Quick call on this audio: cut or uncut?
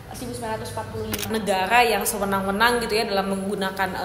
cut